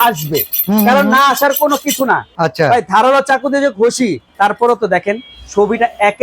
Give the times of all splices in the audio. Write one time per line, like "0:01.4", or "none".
0:02.3
0:04.2